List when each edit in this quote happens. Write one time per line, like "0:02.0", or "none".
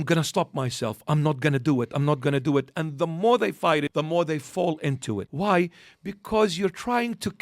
0:03.9
0:05.3